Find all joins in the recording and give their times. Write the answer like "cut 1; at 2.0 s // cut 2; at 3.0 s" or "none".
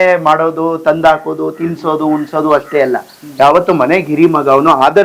none